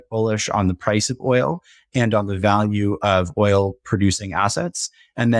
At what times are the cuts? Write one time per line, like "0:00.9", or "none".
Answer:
none